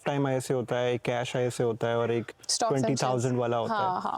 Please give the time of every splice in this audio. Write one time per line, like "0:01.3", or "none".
none